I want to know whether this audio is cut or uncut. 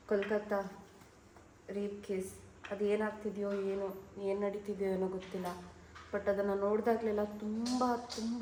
uncut